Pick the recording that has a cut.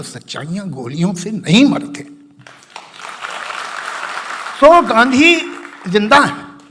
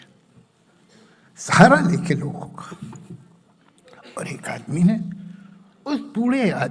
first; 1 cut; at 4.5 s

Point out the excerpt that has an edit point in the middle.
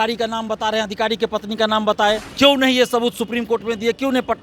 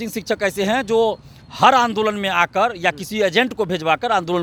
first; 1 cut; at 2.3 s

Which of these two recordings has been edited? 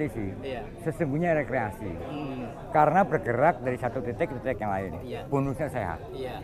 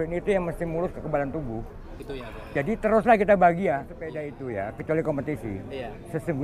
second; 1 cut; at 4.3 s

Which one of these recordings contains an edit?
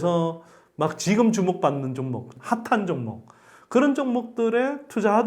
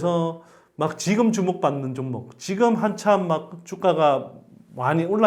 first; 1 cut; at 2.3 s

